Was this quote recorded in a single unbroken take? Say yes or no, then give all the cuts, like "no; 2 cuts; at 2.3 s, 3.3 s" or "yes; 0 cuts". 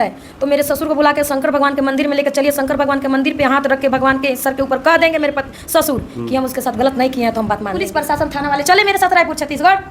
no; 1 cut; at 7.7 s